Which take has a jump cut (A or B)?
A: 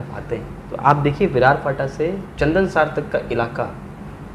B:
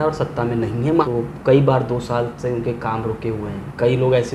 B